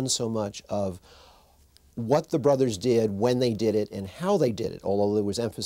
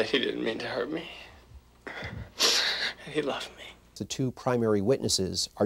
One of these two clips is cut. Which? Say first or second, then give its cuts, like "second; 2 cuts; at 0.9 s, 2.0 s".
second; 1 cut; at 4.0 s